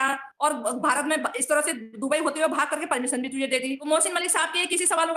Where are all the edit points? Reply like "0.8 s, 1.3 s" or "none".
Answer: 3.8 s